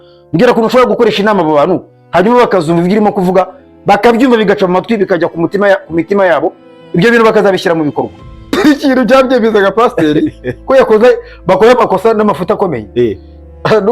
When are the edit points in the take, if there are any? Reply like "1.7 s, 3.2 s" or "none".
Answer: 8.5 s